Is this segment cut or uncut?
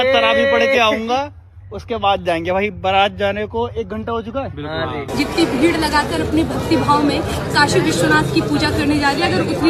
cut